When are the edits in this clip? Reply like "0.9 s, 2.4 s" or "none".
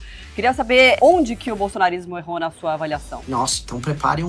1.0 s, 3.1 s

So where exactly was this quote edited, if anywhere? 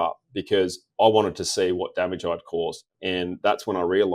2.8 s

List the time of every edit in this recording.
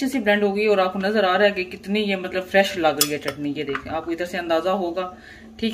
none

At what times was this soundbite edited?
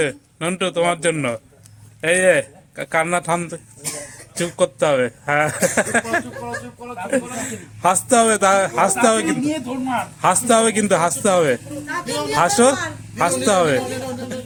none

